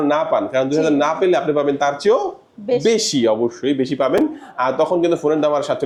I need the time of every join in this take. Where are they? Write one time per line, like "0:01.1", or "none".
none